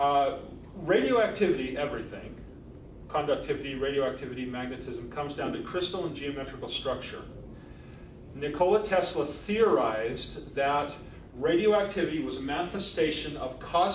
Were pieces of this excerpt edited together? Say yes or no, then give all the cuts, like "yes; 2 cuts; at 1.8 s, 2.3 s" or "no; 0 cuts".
no; 0 cuts